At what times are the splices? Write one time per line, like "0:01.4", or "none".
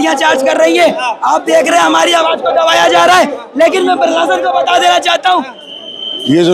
0:05.6